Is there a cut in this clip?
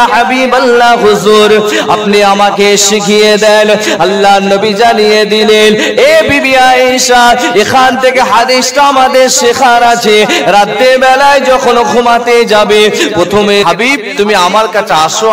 yes; 1 cut; at 13.6 s

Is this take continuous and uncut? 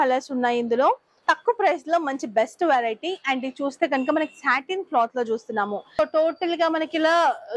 no; 2 cuts; at 1.1 s, 6.0 s

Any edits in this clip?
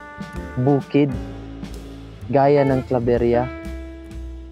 no; 0 cuts

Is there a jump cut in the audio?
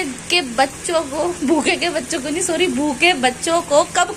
no; 0 cuts

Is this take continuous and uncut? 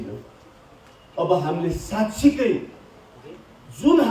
yes; 0 cuts

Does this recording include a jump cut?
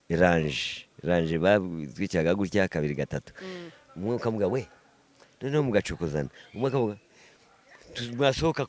no; 0 cuts

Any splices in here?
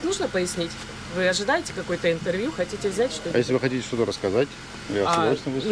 no; 0 cuts

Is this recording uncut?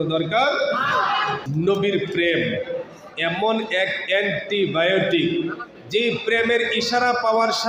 no; 1 cut; at 1.4 s

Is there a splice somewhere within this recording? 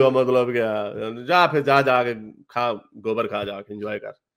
no; 0 cuts

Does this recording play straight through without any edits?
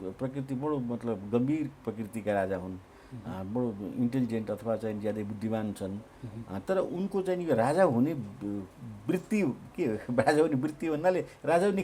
yes; 0 cuts

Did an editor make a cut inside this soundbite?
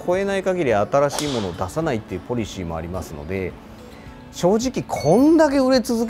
no; 0 cuts

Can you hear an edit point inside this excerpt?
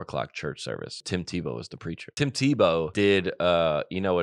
yes; 3 cuts; at 1.0 s, 2.1 s, 2.9 s

